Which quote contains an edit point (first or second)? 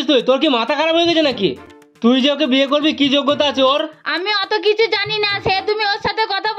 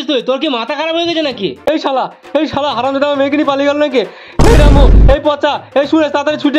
second